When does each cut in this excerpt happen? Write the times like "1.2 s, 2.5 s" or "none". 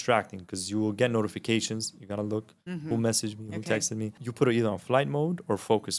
4.2 s